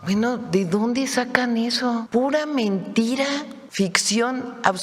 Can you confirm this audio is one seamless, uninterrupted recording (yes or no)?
no